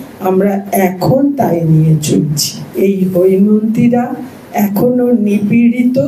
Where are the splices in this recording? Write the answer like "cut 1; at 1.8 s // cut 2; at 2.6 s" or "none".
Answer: cut 1; at 2.6 s